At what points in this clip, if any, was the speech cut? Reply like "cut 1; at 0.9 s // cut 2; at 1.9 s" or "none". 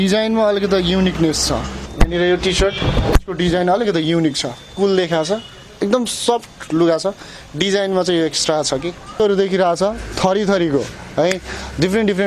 cut 1; at 1.8 s // cut 2; at 9.2 s